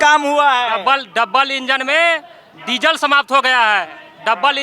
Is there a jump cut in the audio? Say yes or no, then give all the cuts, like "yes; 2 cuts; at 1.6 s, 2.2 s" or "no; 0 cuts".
no; 0 cuts